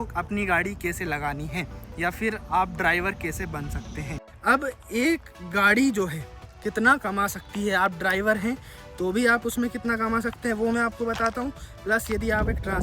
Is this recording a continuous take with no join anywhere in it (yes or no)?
no